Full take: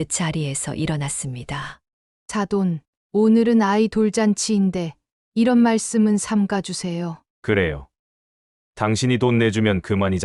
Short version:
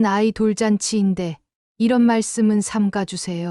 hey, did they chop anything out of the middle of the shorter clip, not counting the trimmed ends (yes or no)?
no